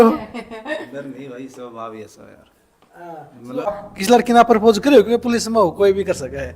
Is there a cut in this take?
yes; 1 cut; at 3.7 s

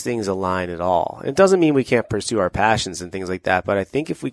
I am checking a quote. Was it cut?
no; 0 cuts

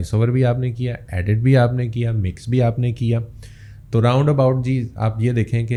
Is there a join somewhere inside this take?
no; 0 cuts

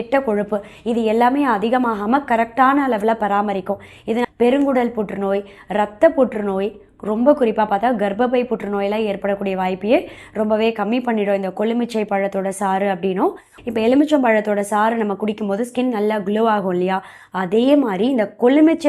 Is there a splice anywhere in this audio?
yes; 2 cuts; at 4.2 s, 13.5 s

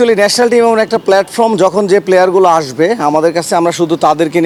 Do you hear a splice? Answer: no; 0 cuts

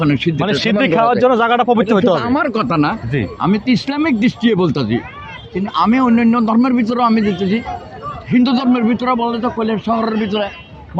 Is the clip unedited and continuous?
yes; 0 cuts

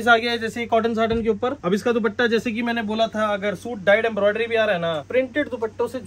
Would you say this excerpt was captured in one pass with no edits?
no; 2 cuts; at 1.6 s, 5.0 s

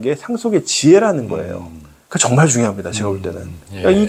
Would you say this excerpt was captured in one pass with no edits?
yes; 0 cuts

